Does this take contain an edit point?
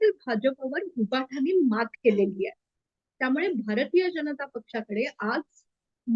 no; 0 cuts

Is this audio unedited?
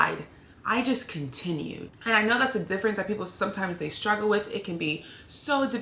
yes; 0 cuts

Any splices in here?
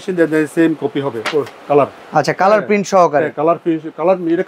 yes; 1 cut; at 2.0 s

